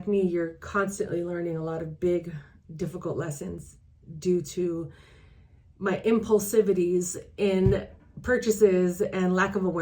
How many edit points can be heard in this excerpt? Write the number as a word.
zero